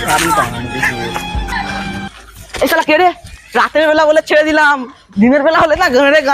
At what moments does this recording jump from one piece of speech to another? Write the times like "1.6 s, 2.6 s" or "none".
none